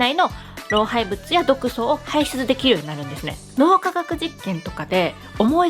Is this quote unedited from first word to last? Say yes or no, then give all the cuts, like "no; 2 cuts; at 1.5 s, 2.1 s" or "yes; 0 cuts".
no; 1 cut; at 3.4 s